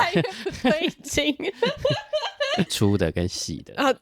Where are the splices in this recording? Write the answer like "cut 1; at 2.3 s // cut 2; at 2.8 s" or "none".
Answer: cut 1; at 2.7 s